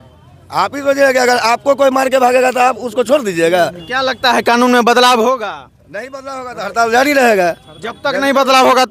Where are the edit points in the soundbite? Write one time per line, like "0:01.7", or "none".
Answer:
0:03.8